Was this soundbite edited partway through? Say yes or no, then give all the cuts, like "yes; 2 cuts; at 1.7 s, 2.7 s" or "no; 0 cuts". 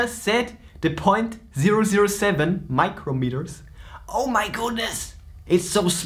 no; 0 cuts